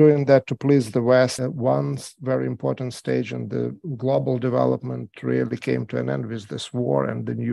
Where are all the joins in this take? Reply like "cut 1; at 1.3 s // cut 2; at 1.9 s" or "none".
cut 1; at 1.4 s